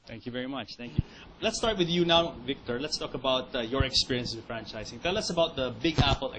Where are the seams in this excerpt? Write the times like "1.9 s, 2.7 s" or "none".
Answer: 4.4 s